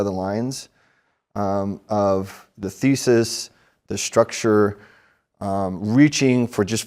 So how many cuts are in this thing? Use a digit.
0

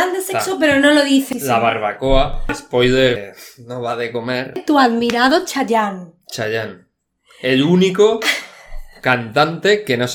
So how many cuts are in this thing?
4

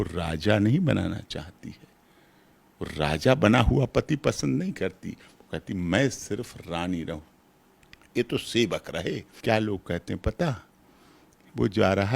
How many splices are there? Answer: 1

